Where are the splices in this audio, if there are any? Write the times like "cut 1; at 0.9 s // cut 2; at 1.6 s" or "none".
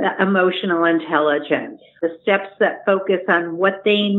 cut 1; at 2.0 s